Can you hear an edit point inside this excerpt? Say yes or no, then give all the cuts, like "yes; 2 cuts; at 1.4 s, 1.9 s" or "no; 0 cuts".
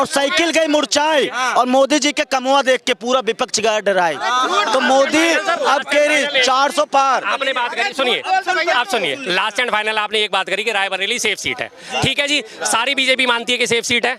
no; 0 cuts